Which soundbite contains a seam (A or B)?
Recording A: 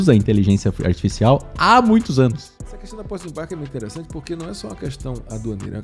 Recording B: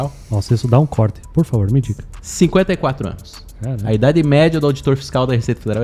A